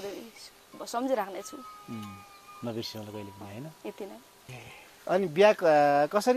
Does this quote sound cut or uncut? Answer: cut